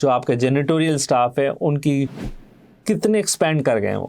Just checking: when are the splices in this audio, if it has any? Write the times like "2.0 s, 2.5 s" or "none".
2.7 s